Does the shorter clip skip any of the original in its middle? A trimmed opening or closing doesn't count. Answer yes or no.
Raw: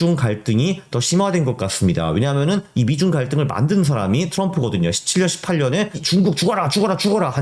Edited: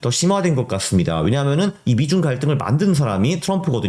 no